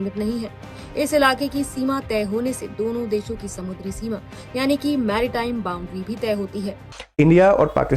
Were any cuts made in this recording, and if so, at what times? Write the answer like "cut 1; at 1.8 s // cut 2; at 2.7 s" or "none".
cut 1; at 6.8 s